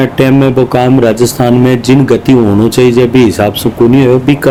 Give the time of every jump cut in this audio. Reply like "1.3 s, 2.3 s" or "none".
none